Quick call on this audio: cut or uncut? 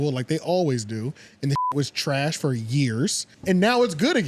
cut